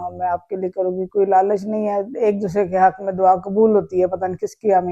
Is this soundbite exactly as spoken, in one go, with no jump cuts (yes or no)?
yes